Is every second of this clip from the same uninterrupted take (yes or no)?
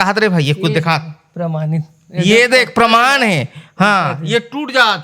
yes